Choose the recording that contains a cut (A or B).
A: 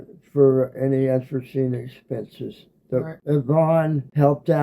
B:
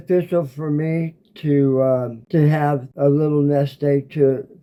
A